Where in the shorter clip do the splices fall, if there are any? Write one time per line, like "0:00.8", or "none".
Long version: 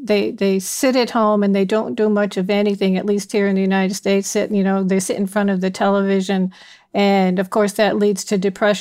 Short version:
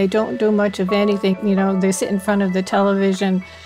0:01.4

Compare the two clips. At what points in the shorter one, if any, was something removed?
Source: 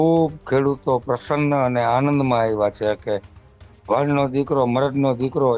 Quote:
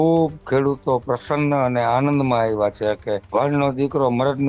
0:03.2

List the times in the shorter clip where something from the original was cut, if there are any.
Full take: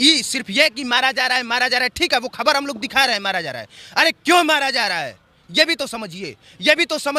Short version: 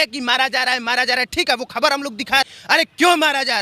0:02.5

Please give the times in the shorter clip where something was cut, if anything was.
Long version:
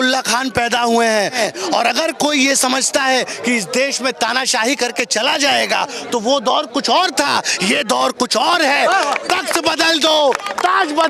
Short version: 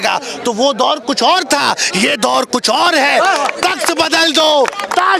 none

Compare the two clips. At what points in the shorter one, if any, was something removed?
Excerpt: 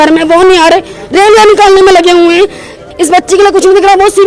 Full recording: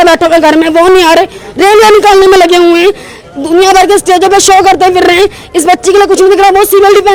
0:02.9

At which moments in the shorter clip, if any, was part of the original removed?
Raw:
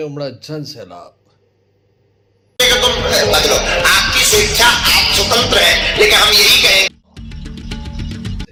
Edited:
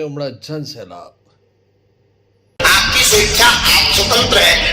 0:02.6

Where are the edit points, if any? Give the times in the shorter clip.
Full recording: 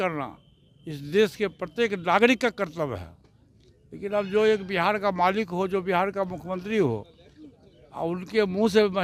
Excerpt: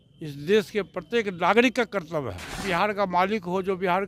0:02.6

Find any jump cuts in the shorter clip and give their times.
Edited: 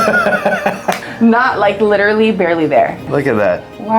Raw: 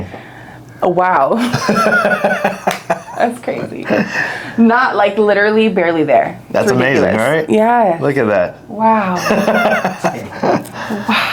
0:01.0
0:03.1

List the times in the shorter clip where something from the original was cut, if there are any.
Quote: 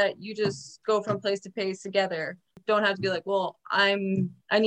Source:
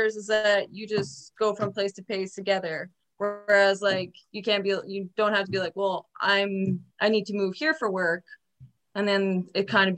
0:02.5

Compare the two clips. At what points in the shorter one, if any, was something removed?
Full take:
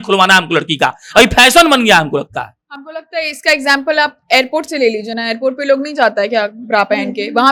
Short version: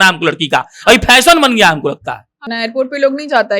0:02.5

